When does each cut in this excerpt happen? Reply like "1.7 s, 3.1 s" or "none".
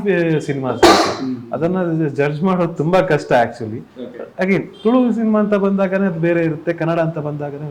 none